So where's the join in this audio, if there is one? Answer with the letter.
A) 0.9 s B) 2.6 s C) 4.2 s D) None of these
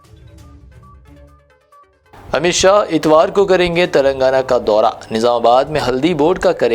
A